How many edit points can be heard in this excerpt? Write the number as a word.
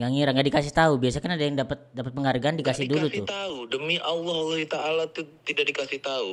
zero